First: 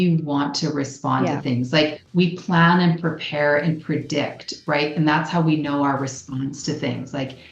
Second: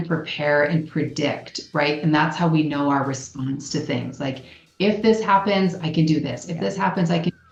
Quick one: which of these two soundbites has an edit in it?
first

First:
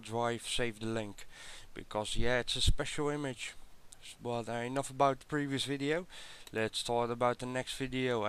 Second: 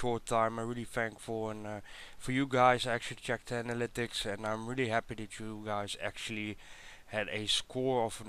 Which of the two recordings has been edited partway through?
second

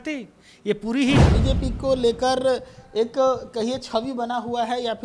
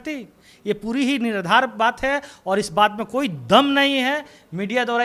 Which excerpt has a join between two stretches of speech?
first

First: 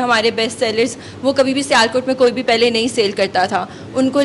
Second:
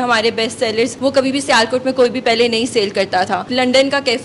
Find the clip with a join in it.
second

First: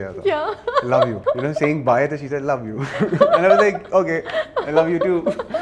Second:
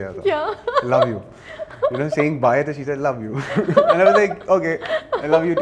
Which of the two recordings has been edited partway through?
first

